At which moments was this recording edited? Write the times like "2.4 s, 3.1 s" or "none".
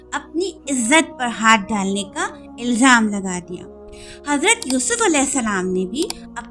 none